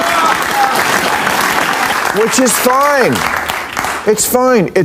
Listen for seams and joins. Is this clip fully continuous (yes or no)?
no